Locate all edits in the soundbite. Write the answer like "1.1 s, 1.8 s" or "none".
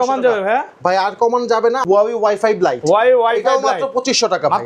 1.8 s